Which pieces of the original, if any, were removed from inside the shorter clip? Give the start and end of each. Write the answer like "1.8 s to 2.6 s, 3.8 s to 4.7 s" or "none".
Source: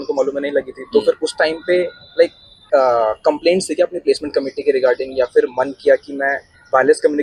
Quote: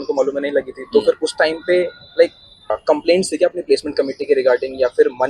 2.7 s to 3.1 s